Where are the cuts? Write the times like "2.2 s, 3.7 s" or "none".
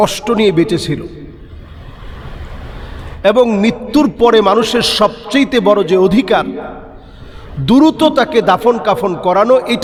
none